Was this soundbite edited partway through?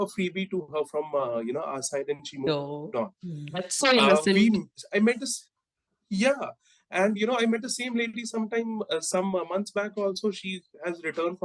no; 0 cuts

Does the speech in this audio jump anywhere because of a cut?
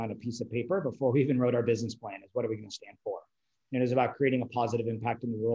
no; 0 cuts

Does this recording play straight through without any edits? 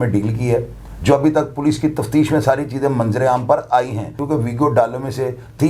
no; 1 cut; at 4.2 s

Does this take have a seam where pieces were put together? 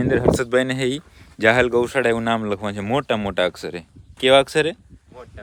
no; 0 cuts

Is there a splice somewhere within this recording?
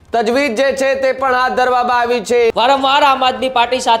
yes; 1 cut; at 2.5 s

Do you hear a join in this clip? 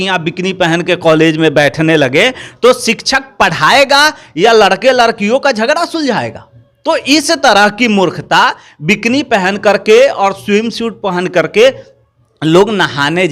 no; 0 cuts

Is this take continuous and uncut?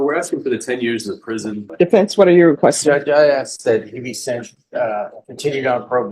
no; 1 cut; at 1.7 s

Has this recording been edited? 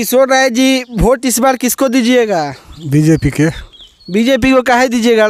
no; 0 cuts

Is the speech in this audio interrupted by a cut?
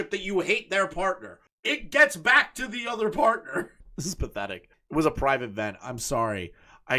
no; 0 cuts

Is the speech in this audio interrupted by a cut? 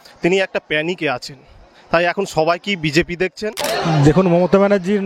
yes; 1 cut; at 3.5 s

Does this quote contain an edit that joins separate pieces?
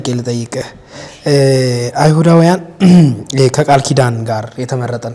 no; 0 cuts

